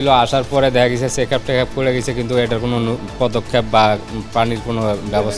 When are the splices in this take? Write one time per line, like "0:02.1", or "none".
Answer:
none

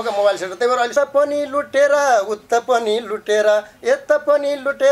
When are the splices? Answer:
0:00.9

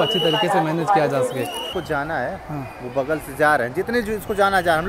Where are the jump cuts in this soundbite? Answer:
0:01.6

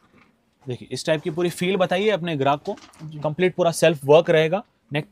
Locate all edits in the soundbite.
none

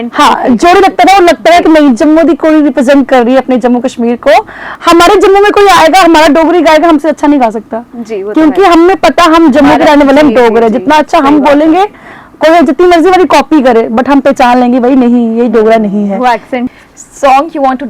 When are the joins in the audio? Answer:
0:04.6
0:16.8

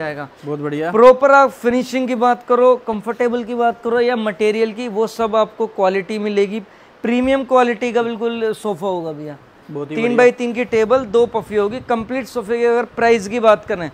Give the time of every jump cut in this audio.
none

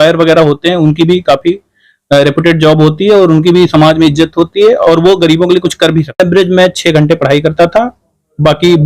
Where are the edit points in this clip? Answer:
0:06.2

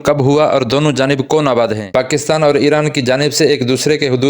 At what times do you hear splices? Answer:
0:01.8

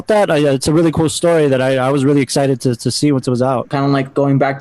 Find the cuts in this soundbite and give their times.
0:03.7

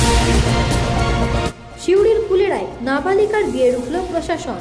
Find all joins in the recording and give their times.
0:01.6

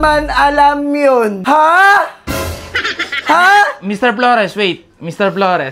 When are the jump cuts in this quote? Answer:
0:01.4

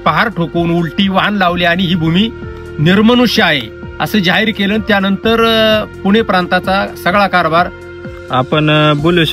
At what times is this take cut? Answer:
0:08.0

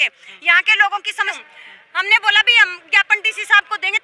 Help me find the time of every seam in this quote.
0:01.4

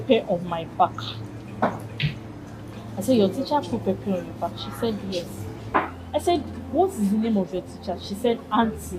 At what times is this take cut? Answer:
0:05.5

